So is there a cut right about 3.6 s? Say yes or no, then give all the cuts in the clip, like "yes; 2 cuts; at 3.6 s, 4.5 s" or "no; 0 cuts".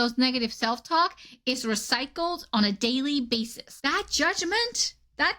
yes; 1 cut; at 3.6 s